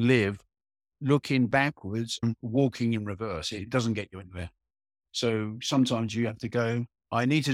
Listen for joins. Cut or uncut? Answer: uncut